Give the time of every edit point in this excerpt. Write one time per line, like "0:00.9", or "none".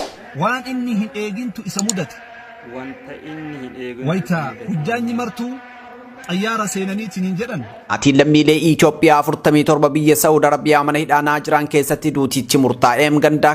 0:07.7